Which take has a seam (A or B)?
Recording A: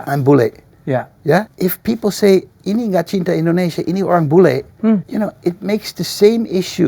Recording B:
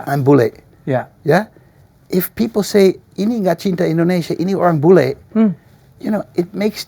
A